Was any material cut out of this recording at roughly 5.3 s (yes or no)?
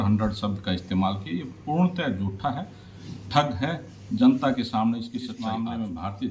yes